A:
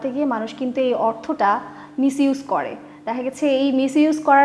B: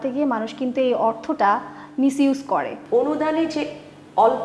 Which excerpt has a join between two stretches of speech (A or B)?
B